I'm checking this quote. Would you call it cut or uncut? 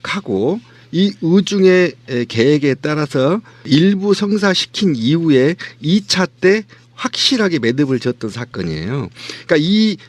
cut